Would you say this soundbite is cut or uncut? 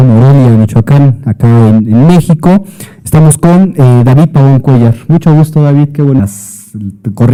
uncut